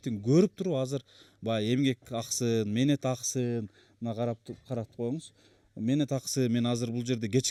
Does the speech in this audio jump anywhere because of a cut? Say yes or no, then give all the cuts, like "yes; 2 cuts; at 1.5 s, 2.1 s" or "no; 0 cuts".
no; 0 cuts